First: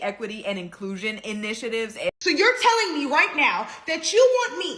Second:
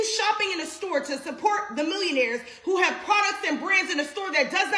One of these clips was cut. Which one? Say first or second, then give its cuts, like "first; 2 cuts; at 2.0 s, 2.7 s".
first; 1 cut; at 2.1 s